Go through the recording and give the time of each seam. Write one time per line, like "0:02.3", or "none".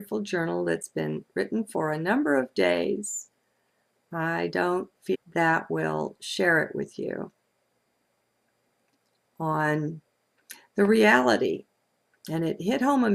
none